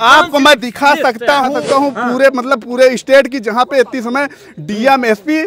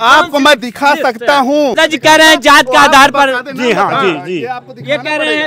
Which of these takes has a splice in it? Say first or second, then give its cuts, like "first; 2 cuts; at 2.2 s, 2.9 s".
first; 1 cut; at 1.5 s